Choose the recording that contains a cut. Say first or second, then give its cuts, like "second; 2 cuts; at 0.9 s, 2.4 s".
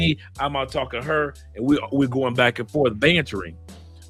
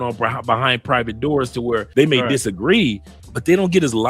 second; 2 cuts; at 1.9 s, 3.1 s